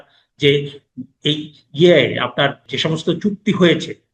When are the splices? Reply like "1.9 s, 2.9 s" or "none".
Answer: 2.6 s